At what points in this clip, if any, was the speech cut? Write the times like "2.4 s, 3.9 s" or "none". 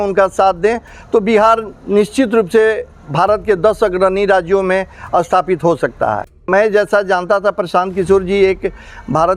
6.4 s